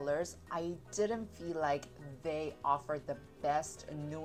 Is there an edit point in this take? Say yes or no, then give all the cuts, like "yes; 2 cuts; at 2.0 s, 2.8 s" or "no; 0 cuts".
no; 0 cuts